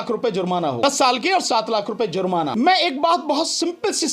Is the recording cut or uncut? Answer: cut